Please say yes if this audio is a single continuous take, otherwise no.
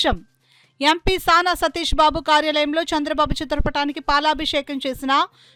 yes